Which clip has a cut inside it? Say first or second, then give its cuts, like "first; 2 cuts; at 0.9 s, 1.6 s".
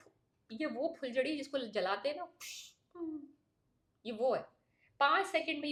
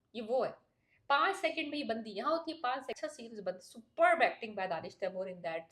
second; 1 cut; at 2.9 s